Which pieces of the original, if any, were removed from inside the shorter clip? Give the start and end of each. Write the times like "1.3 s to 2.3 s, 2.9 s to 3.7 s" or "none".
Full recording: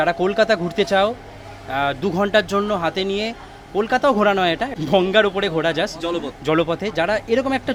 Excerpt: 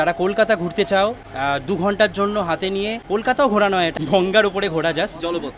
1.3 s to 1.6 s, 3.3 s to 3.6 s, 4.6 s to 4.8 s

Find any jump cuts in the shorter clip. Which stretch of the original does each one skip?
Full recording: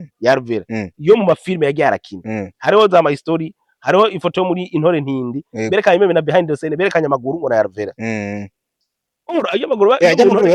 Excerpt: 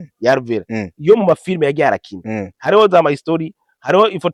none

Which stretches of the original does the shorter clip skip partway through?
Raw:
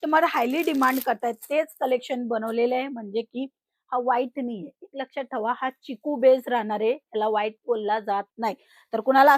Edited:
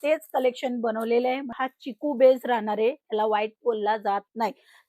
3.0 s to 5.6 s

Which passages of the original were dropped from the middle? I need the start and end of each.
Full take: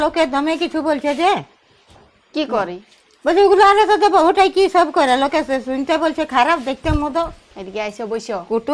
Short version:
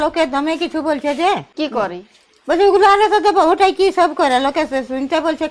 1.5 s to 2.3 s

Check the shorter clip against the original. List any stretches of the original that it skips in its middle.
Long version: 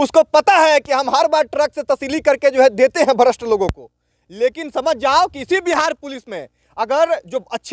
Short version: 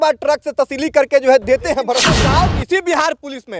3.4 s to 4.9 s

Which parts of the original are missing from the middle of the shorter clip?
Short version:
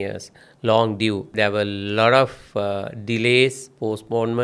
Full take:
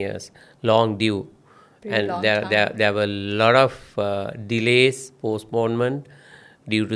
1.3 s to 2.7 s

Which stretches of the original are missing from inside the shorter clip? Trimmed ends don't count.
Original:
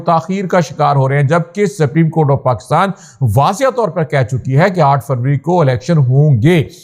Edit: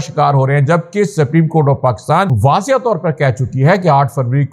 3.0 s to 3.3 s

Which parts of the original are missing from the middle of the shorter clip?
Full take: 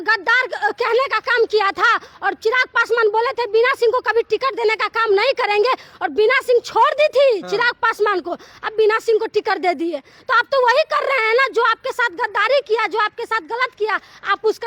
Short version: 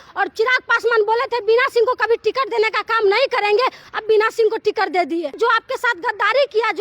5.9 s to 8.6 s, 10.0 s to 11.5 s

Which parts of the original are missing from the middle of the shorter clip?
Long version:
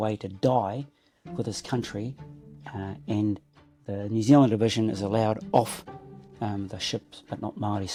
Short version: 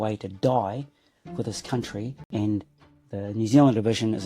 2.2 s to 3.0 s

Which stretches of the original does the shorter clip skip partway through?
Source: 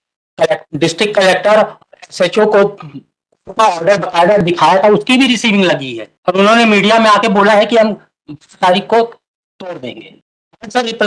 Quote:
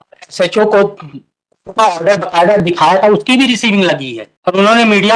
none

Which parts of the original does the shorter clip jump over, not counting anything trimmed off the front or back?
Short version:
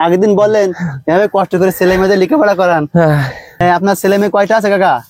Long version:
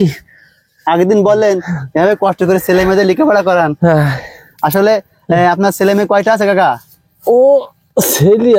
4.5 s to 5.4 s

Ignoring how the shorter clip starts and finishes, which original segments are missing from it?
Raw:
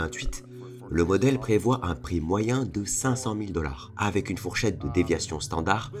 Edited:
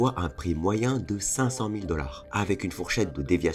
none

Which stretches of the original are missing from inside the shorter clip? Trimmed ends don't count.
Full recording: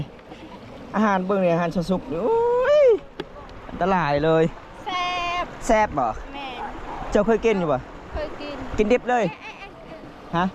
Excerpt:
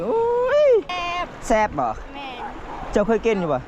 3.1 s to 5.1 s

